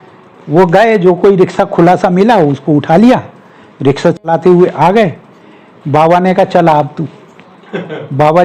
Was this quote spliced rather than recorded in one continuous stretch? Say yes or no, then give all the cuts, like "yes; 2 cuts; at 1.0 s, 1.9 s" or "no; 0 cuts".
no; 0 cuts